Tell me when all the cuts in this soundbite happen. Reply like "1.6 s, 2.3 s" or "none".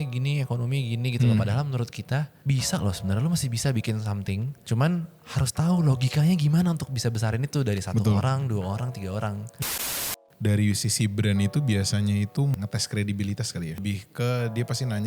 2.3 s, 4.6 s, 9.8 s, 12.5 s, 13.8 s